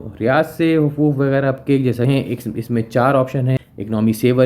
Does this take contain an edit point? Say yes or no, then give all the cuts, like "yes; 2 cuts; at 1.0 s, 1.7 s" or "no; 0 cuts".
yes; 1 cut; at 2.0 s